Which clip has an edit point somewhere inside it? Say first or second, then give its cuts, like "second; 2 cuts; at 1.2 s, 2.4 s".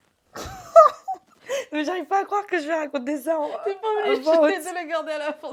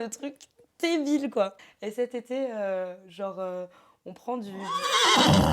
second; 2 cuts; at 1.6 s, 4.6 s